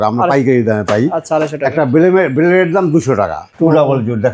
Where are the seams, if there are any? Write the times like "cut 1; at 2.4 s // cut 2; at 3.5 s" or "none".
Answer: cut 1; at 3.4 s